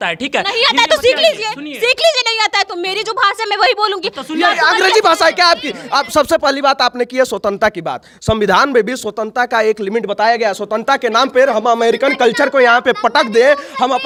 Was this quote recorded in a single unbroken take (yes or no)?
yes